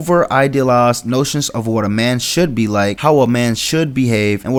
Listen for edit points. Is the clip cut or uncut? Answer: uncut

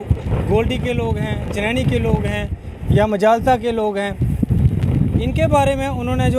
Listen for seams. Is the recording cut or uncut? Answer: uncut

